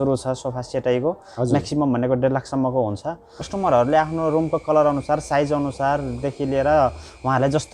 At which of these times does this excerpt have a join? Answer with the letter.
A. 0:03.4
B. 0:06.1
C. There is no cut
A